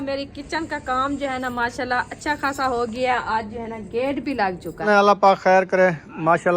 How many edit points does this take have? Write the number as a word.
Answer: one